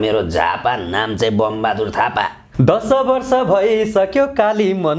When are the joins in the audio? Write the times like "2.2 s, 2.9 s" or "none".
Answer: 2.4 s